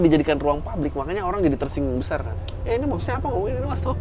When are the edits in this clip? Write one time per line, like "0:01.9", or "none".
none